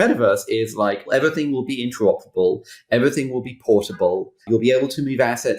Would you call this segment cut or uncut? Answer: cut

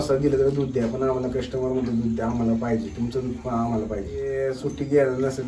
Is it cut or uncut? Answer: cut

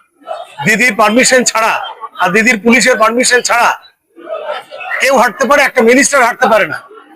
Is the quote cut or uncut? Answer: uncut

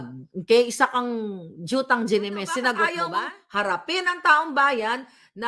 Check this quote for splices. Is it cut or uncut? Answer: cut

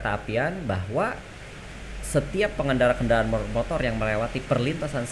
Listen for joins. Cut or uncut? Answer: uncut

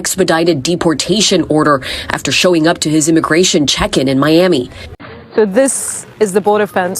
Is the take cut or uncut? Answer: cut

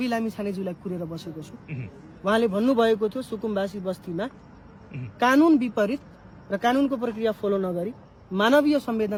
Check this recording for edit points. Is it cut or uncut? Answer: uncut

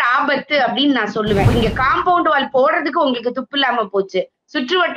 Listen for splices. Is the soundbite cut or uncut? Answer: cut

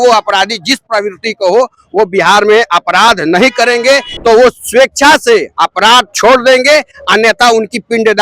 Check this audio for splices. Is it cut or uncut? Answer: cut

